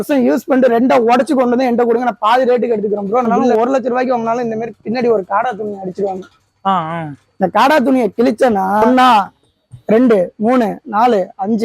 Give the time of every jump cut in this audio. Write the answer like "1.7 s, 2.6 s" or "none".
3.4 s, 8.9 s